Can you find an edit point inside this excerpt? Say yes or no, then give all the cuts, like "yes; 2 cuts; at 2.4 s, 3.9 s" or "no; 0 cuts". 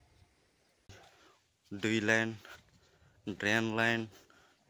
yes; 1 cut; at 1.0 s